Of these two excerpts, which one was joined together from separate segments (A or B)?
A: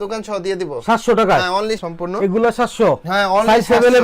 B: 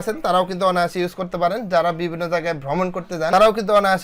A